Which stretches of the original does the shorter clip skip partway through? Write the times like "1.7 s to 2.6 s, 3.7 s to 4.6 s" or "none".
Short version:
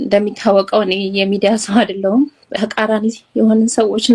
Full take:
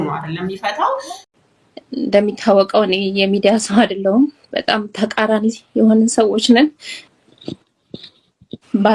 4.5 s to 4.9 s